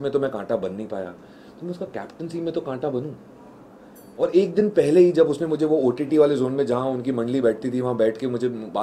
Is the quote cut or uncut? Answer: uncut